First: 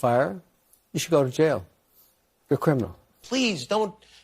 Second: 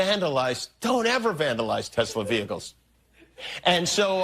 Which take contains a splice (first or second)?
first